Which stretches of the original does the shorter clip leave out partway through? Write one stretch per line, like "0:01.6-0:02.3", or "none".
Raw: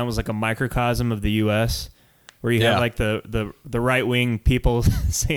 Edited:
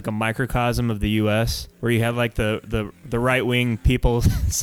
0:01.8-0:02.2